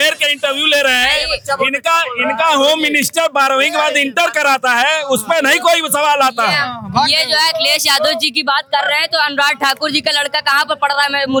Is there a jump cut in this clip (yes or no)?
no